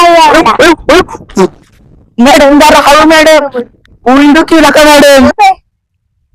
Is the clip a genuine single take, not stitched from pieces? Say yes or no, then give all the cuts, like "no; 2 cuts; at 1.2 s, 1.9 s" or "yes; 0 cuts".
no; 1 cut; at 5.3 s